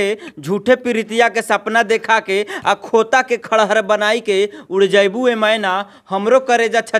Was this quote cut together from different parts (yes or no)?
no